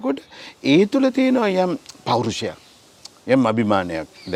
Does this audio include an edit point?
no; 0 cuts

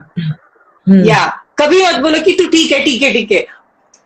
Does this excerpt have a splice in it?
no; 0 cuts

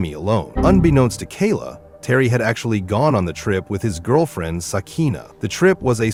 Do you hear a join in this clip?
no; 0 cuts

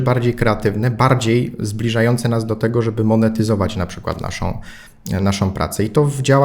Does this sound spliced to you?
no; 0 cuts

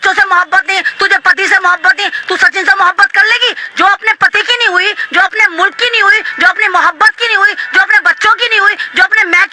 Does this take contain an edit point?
no; 0 cuts

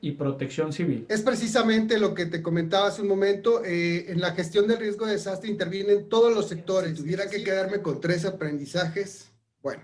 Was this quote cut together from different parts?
yes; 1 cut; at 7.0 s

